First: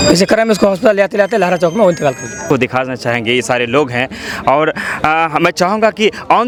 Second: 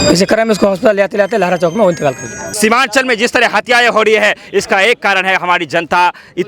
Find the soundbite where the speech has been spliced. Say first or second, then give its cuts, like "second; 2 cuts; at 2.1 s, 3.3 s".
second; 1 cut; at 2.3 s